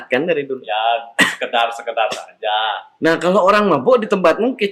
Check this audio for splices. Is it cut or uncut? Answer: uncut